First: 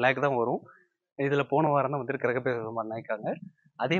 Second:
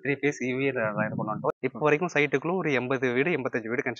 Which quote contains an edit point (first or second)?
second